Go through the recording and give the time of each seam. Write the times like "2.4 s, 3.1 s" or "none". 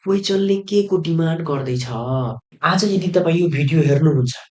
2.4 s